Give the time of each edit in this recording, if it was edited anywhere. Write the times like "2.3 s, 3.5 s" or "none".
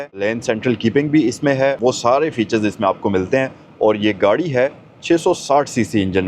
1.8 s